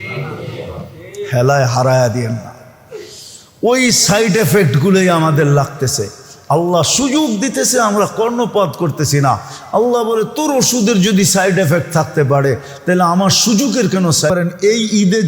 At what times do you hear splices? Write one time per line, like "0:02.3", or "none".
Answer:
0:14.3